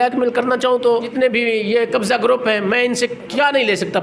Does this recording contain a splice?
yes; 1 cut; at 1.1 s

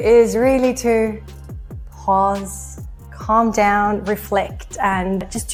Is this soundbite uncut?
yes; 0 cuts

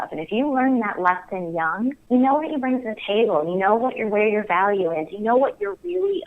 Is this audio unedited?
no; 1 cut; at 2.0 s

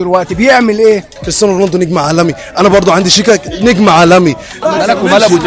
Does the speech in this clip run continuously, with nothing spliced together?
no; 2 cuts; at 1.2 s, 4.5 s

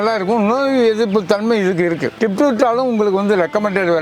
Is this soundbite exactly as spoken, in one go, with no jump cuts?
no; 1 cut; at 2.1 s

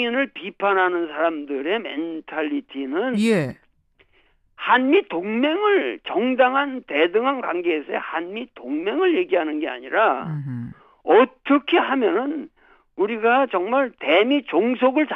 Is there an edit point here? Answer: no; 0 cuts

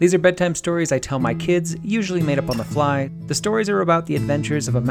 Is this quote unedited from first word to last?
no; 1 cut; at 3.2 s

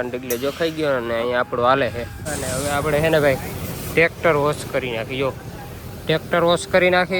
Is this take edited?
yes; 1 cut; at 2.2 s

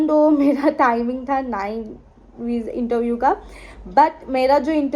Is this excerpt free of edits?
yes; 0 cuts

